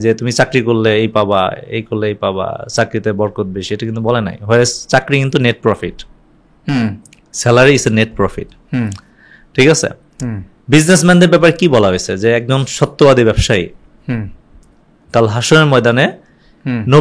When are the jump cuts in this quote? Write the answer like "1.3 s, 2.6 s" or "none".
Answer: none